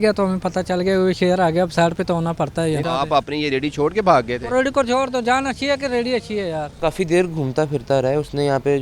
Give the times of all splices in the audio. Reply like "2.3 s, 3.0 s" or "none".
2.8 s, 6.7 s